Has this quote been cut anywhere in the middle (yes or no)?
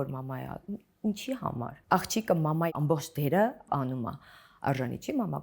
yes